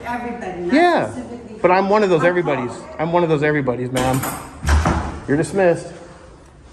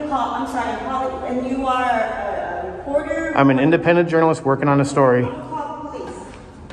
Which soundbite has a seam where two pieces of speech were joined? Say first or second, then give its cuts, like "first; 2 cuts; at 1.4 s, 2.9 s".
first; 1 cut; at 5.1 s